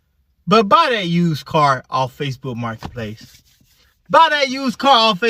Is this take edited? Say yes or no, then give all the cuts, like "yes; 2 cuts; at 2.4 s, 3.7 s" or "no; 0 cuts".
no; 0 cuts